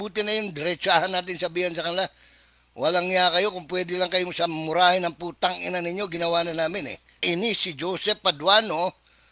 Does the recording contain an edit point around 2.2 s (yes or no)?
no